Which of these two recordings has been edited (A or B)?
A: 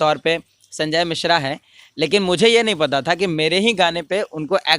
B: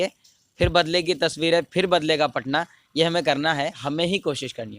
B